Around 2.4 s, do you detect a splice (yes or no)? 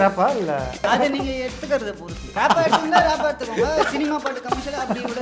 yes